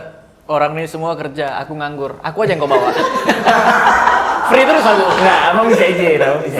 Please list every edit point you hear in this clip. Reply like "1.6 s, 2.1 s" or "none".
none